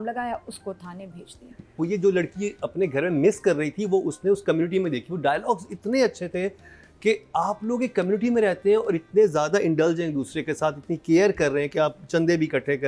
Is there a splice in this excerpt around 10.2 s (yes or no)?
no